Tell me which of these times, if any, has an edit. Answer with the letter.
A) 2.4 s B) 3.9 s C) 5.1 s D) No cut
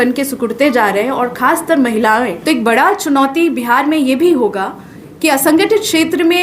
A